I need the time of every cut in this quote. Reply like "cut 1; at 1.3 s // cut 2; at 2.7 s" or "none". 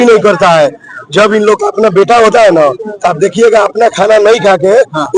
none